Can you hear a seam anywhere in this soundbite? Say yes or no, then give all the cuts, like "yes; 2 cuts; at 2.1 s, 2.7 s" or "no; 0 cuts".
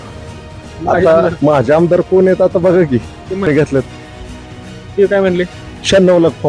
yes; 2 cuts; at 1.4 s, 3.5 s